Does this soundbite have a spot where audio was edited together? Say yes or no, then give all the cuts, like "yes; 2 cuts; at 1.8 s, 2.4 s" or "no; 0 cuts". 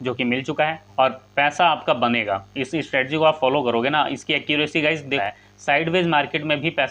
yes; 2 cuts; at 0.8 s, 5.2 s